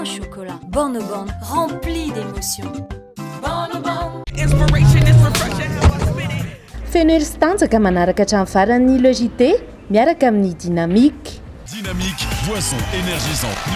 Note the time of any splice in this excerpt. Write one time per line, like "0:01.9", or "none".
0:04.2